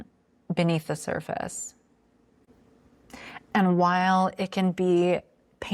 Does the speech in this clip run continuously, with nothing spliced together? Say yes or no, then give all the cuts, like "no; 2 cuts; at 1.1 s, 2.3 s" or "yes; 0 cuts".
yes; 0 cuts